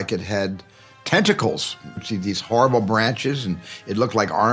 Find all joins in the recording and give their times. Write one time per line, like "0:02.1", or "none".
0:02.0